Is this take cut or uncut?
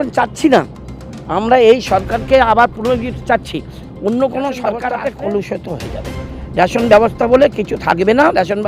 cut